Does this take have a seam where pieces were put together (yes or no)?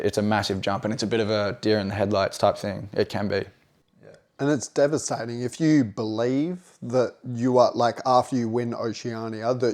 no